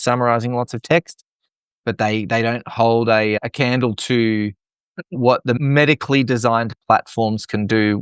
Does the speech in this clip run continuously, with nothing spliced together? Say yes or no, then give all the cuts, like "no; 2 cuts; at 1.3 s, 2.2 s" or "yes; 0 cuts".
no; 1 cut; at 5.6 s